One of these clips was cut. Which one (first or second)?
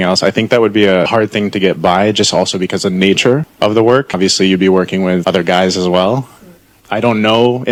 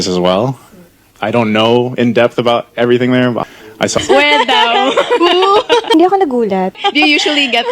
second